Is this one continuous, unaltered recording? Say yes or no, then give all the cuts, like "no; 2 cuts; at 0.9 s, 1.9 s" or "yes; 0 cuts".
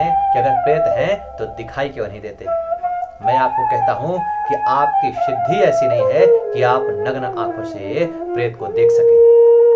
yes; 0 cuts